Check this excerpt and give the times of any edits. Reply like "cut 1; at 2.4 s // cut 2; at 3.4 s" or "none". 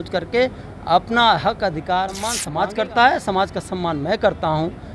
cut 1; at 2.4 s